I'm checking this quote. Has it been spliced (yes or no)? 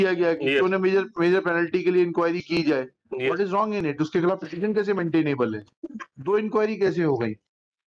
no